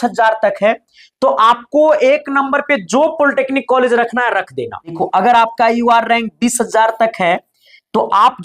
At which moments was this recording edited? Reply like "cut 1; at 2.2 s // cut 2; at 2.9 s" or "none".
cut 1; at 5.0 s